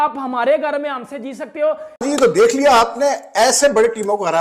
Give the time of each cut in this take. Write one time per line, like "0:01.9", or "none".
0:02.0

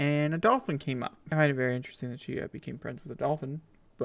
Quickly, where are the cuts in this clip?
0:01.2

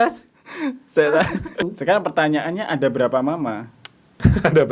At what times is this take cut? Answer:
0:01.7

